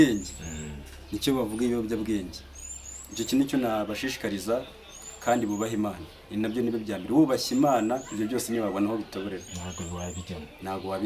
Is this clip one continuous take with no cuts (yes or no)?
yes